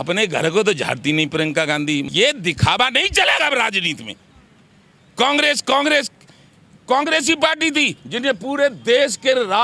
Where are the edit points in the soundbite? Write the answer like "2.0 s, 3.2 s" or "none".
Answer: 2.1 s